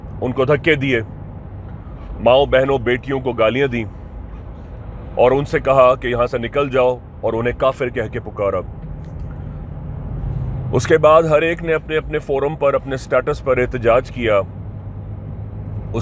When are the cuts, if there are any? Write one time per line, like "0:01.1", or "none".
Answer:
none